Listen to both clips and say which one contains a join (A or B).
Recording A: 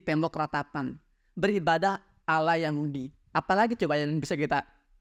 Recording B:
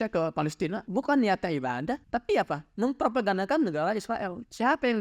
B